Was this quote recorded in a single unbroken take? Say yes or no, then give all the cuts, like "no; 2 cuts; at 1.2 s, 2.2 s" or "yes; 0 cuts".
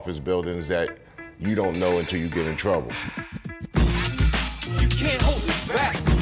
no; 1 cut; at 3.3 s